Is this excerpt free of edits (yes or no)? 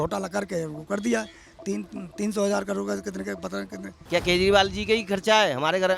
no